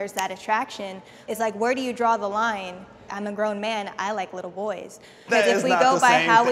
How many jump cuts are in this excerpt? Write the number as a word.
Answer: three